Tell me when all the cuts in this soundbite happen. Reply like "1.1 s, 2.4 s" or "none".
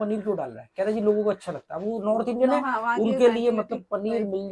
none